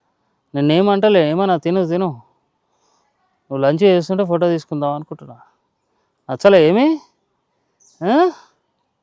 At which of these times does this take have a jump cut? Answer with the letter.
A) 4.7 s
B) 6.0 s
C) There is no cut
C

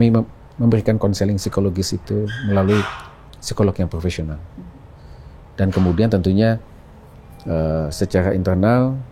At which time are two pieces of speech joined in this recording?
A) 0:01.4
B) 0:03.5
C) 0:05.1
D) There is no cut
D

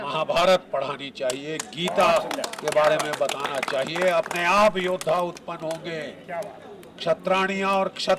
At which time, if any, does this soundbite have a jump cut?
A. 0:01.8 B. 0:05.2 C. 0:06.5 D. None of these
D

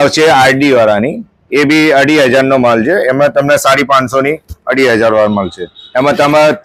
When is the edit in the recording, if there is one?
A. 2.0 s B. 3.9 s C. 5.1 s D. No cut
D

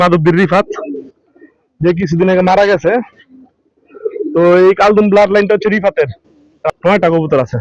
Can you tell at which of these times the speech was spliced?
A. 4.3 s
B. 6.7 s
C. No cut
B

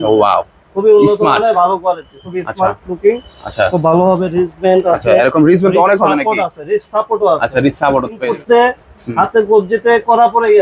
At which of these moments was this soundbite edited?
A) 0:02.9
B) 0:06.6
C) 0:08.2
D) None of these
C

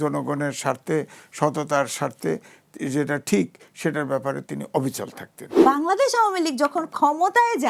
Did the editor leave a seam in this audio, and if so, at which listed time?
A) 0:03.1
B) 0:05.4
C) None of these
B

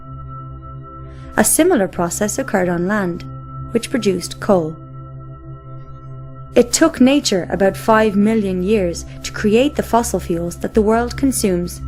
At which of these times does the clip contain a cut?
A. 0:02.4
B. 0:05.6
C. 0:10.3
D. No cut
D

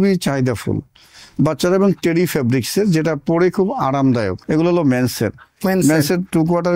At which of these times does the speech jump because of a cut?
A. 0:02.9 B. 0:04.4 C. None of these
B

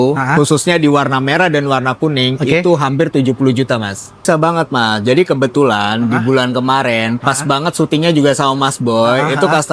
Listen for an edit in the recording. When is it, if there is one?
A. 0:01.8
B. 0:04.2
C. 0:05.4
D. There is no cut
B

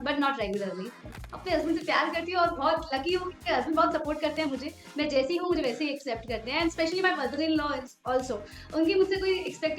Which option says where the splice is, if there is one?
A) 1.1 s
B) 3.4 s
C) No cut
A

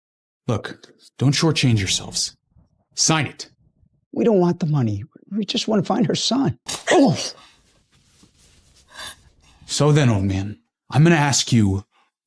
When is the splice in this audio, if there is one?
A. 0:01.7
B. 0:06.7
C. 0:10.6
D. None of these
B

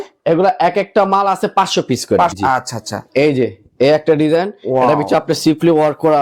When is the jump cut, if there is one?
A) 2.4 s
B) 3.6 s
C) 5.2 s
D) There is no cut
A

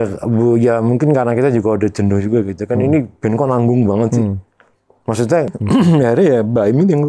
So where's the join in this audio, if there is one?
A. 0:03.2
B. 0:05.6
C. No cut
B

